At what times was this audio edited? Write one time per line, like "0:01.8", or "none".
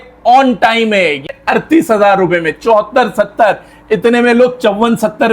0:01.3